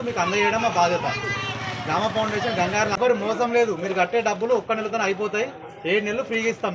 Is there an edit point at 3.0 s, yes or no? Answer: yes